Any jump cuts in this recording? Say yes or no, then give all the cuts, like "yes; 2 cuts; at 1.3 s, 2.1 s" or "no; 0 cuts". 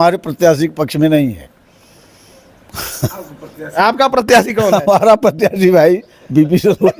no; 0 cuts